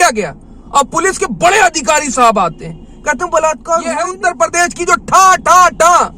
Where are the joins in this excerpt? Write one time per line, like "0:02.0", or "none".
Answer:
0:04.1